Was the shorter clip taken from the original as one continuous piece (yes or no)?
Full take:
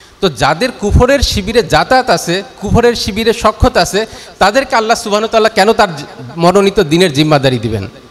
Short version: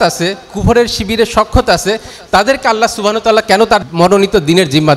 no